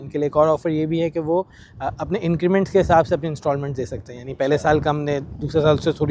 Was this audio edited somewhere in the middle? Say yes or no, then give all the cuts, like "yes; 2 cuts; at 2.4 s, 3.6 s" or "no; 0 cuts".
no; 0 cuts